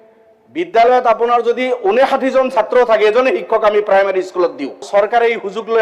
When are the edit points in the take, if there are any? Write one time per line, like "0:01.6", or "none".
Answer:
0:04.9